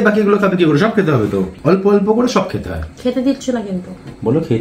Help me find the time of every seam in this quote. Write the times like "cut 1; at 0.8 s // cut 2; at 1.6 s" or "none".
cut 1; at 1.5 s